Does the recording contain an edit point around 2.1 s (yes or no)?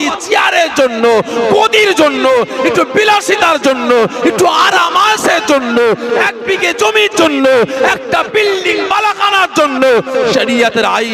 no